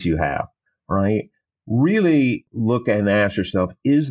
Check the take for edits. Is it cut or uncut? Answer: cut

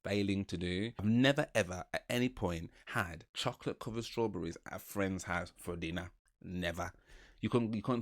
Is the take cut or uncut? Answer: cut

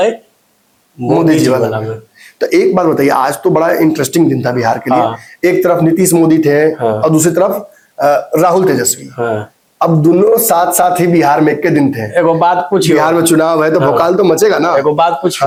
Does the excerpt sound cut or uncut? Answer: uncut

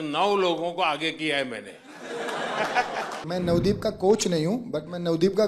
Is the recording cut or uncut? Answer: cut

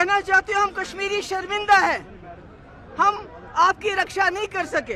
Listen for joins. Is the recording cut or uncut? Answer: uncut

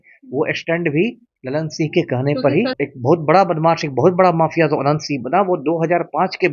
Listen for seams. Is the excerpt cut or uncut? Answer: cut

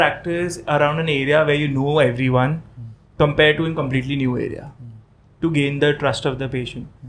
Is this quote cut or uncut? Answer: uncut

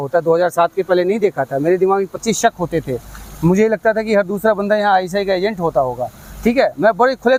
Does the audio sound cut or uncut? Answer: uncut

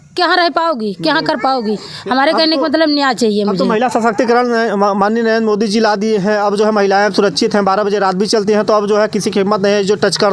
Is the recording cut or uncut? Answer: uncut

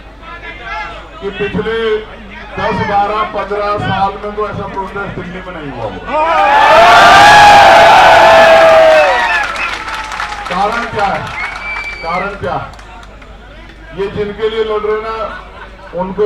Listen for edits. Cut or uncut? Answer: uncut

